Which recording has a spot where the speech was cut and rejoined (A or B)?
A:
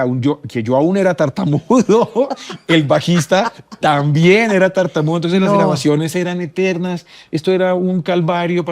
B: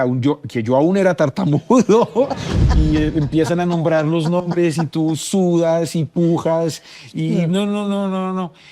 B